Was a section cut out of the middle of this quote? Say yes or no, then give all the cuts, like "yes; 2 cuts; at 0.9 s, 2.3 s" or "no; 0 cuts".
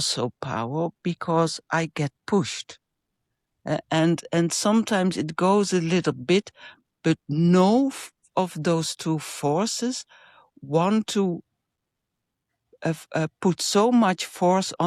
no; 0 cuts